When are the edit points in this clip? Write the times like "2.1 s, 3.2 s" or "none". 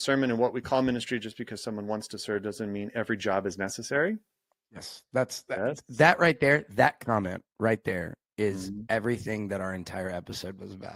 none

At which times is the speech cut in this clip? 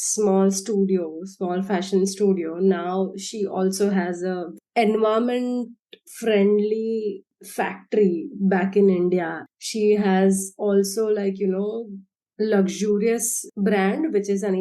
4.5 s, 7.3 s

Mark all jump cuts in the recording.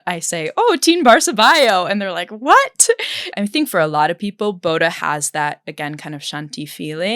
3.3 s

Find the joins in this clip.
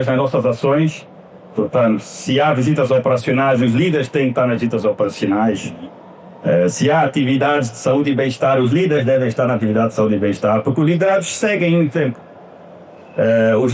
none

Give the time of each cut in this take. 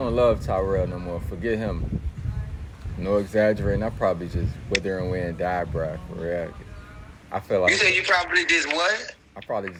none

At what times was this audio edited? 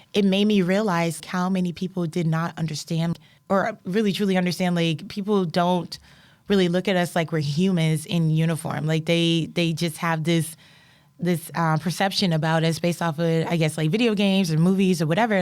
1.2 s, 3.2 s

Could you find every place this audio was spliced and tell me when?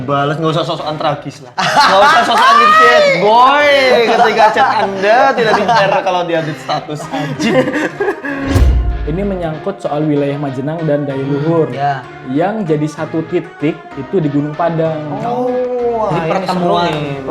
8.6 s

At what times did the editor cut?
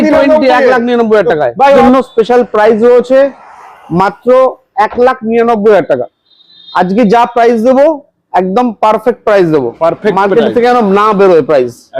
1.8 s

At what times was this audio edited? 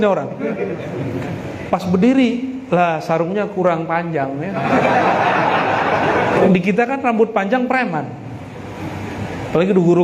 6.4 s

